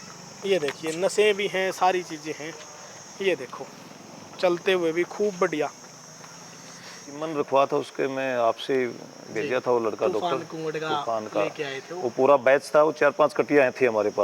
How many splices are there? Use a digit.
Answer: 1